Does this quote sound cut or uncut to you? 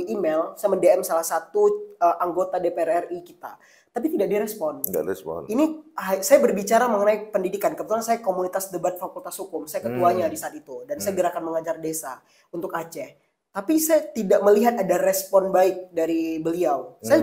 uncut